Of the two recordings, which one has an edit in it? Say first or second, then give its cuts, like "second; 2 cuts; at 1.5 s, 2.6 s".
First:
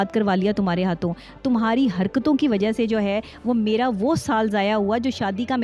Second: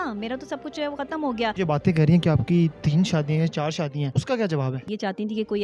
second; 3 cuts; at 1.5 s, 4.1 s, 4.9 s